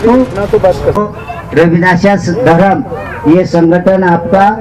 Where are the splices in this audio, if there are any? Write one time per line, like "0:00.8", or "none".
0:01.0